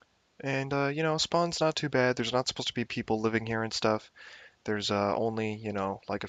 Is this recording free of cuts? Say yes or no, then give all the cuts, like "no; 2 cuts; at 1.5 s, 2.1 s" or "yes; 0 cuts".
yes; 0 cuts